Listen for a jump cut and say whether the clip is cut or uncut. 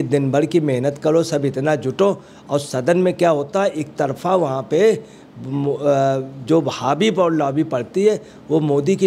uncut